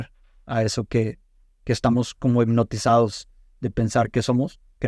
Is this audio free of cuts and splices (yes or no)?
yes